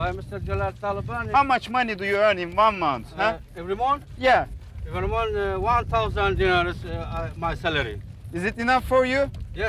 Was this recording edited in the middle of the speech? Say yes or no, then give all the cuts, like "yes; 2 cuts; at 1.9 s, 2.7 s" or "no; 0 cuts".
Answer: no; 0 cuts